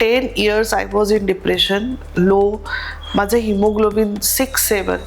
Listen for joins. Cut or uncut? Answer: uncut